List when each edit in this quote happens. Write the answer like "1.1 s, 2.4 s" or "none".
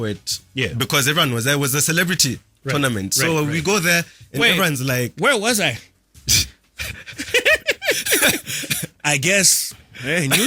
none

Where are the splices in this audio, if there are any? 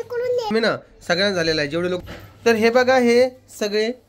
2.0 s

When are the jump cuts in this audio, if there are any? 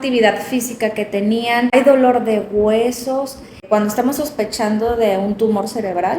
1.7 s, 3.6 s

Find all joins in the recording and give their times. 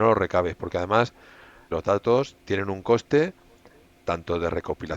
1.7 s

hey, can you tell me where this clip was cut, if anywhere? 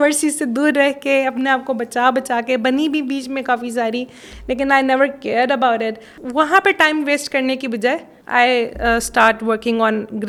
none

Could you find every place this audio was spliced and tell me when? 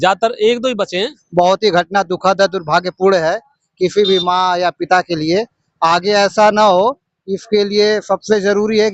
1.1 s

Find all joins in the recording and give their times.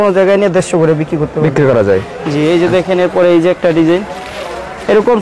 none

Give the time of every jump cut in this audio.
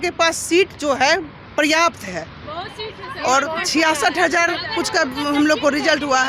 none

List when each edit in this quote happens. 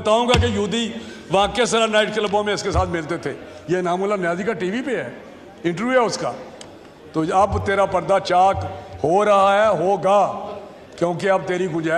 none

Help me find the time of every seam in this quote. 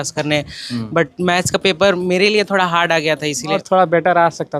3.6 s

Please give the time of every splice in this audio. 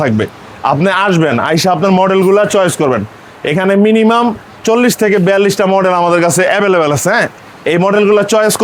none

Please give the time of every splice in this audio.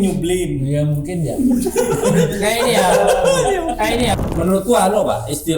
4.2 s

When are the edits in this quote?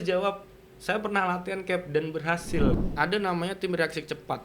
2.8 s

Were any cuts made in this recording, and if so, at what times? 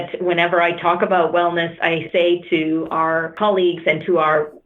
2.0 s, 3.3 s

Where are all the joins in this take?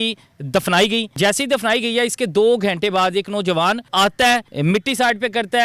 1.2 s, 3.8 s, 4.5 s

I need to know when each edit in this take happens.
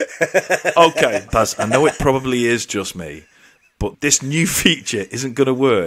1.3 s, 3.9 s

